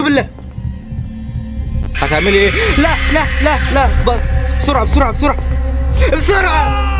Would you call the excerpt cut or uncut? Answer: uncut